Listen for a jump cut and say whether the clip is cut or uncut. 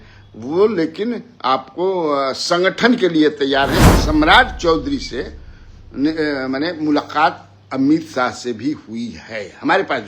cut